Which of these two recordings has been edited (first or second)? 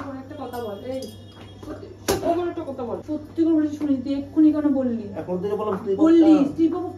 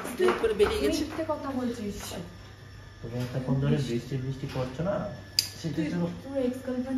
first